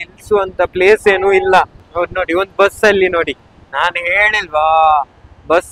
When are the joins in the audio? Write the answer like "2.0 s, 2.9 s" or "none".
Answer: 1.8 s